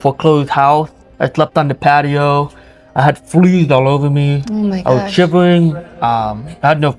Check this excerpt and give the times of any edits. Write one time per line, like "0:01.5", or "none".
none